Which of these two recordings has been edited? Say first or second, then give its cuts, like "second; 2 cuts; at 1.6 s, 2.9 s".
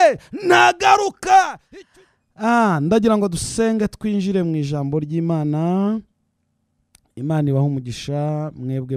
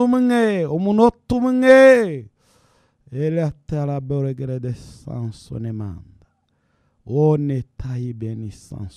first; 1 cut; at 1.7 s